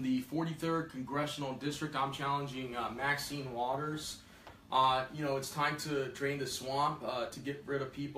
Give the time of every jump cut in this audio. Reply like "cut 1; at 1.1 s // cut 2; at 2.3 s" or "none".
cut 1; at 5.2 s

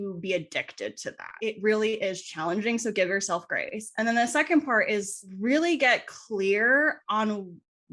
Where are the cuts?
cut 1; at 1.3 s

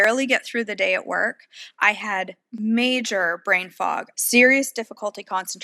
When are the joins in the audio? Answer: cut 1; at 2.4 s // cut 2; at 4.1 s

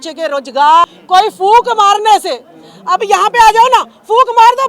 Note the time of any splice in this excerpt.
cut 1; at 1.0 s

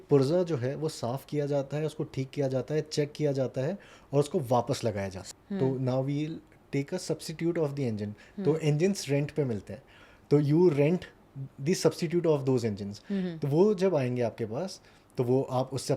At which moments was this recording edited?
cut 1; at 5.2 s

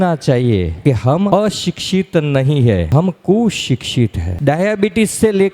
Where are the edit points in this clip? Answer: cut 1; at 1.1 s // cut 2; at 2.9 s // cut 3; at 4.3 s

